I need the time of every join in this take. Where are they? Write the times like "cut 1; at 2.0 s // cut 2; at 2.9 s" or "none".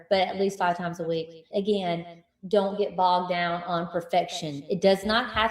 cut 1; at 1.5 s